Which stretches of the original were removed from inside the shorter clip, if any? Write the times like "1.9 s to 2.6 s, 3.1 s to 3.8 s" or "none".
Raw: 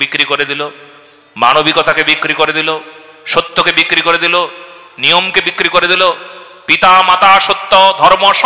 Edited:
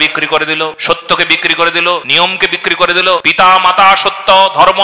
2.8 s to 3.2 s, 4.5 s to 5.0 s, 6.2 s to 6.7 s